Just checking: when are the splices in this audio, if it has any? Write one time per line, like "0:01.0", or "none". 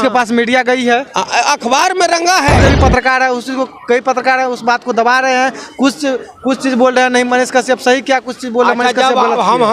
0:02.6